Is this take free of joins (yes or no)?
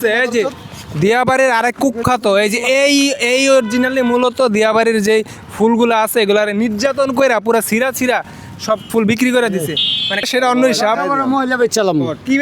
no